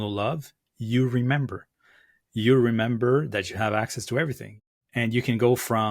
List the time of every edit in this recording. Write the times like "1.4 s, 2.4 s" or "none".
4.5 s